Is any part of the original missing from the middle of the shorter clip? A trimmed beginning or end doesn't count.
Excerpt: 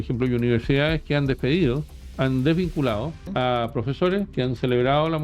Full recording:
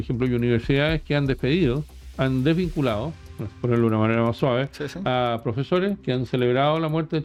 yes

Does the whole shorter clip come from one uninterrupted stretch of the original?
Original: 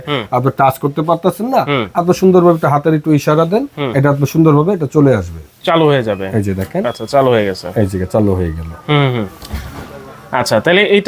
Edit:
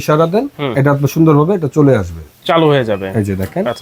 yes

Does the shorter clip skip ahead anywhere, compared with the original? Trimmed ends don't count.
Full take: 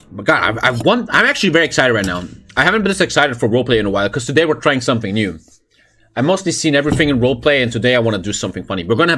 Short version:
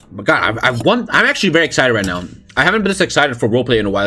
no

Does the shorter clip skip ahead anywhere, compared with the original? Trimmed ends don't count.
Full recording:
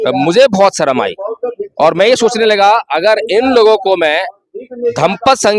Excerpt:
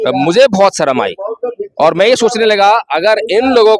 no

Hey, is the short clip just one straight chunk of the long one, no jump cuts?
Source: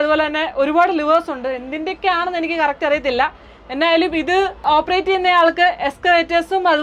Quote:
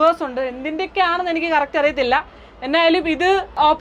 yes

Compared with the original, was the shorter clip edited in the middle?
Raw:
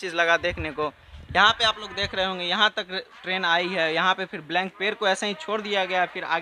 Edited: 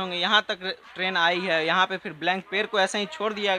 no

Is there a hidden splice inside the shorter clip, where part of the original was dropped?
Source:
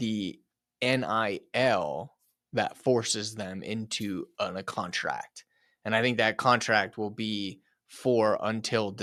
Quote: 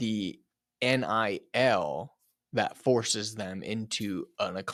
no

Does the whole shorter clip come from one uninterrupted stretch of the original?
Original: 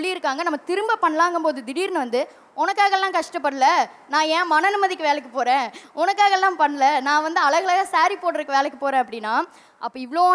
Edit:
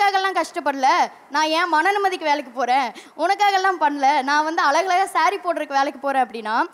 yes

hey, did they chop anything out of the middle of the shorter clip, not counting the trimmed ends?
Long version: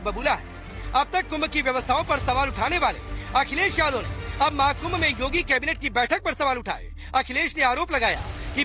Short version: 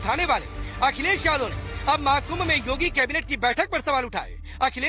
no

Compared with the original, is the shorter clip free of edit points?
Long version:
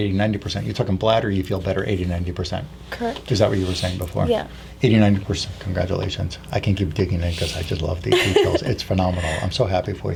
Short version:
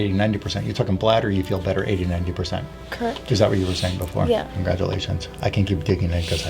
no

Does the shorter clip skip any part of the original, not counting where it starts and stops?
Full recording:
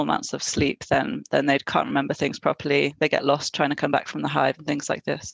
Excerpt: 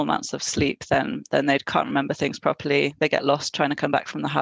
no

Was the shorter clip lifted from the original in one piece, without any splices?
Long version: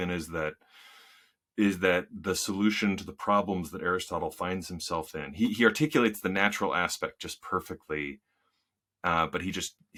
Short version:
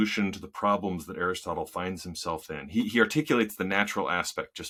yes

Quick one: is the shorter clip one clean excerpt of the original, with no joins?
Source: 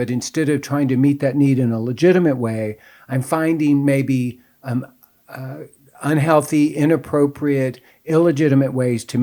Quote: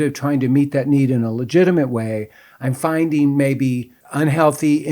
no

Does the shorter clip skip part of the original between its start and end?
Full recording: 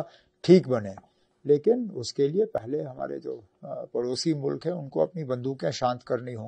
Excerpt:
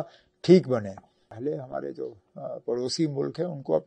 yes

